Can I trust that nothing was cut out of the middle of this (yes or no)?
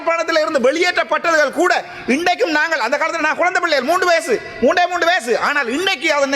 yes